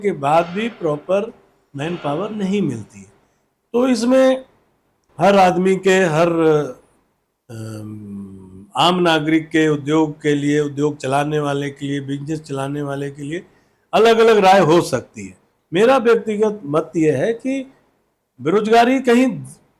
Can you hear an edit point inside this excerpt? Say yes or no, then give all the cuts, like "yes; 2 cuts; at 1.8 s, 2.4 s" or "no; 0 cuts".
no; 0 cuts